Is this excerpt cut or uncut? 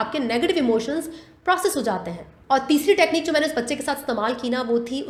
uncut